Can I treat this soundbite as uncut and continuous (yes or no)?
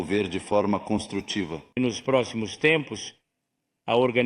no